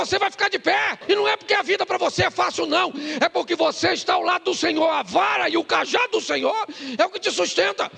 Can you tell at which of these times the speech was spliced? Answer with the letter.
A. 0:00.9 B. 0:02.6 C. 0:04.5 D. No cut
A